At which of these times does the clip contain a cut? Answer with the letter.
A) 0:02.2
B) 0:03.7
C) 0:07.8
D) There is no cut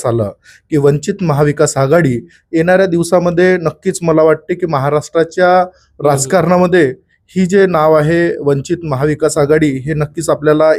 D